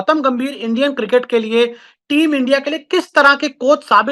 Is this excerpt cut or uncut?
uncut